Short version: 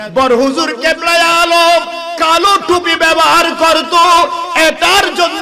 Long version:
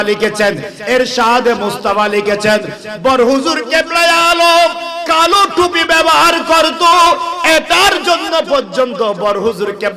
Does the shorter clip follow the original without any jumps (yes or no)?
yes